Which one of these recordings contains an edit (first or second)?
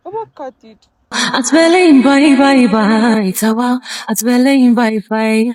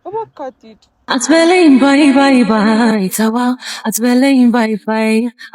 second